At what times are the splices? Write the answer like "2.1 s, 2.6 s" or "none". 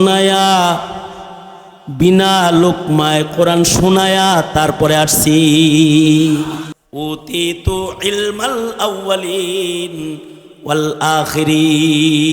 6.8 s